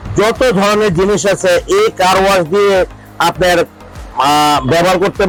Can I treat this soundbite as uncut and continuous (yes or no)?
yes